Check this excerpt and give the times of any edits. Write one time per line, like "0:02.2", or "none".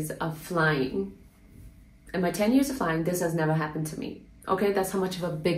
none